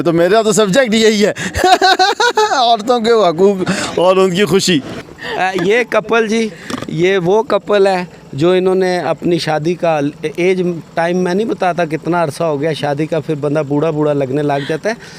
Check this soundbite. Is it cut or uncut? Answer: cut